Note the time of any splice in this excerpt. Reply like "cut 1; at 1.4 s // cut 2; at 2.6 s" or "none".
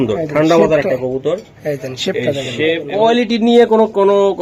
cut 1; at 2.8 s